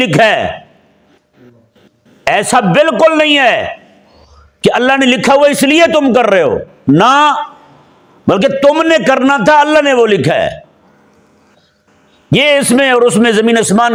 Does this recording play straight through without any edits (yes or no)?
yes